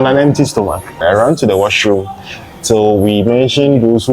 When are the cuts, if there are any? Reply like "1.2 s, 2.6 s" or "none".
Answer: 0.9 s